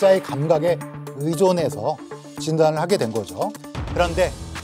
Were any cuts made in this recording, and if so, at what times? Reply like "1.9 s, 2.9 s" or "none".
3.6 s